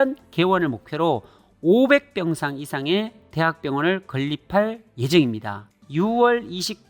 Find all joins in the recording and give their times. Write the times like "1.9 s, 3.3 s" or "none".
5.8 s